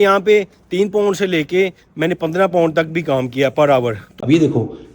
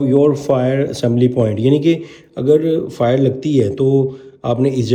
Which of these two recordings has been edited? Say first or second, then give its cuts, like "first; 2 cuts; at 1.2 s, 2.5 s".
first; 1 cut; at 4.0 s